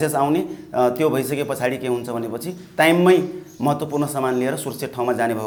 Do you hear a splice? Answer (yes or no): no